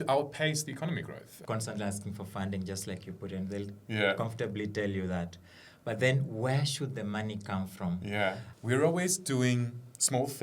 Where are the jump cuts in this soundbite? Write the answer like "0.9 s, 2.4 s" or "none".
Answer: 1.4 s, 8.5 s